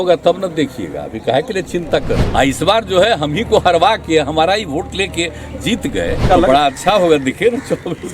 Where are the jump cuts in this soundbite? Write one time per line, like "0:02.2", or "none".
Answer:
0:02.2
0:06.3

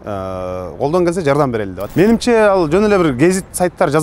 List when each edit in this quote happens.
0:01.8

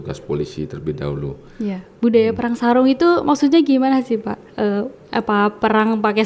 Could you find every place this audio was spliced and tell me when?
0:01.8

